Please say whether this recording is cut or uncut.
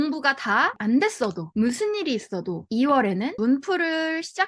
cut